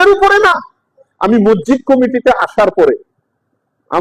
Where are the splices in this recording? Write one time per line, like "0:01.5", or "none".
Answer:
0:01.1